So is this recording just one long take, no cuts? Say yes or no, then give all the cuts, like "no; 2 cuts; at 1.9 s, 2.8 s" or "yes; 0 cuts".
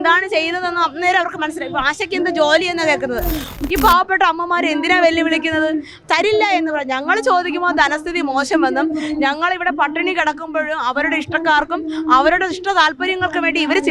no; 1 cut; at 3.6 s